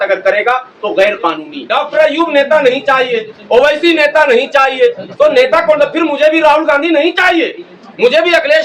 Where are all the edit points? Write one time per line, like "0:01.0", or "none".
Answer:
0:01.6